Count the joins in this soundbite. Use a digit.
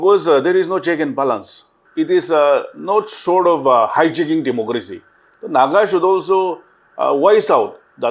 1